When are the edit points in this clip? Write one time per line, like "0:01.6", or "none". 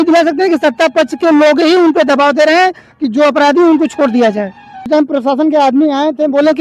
0:04.9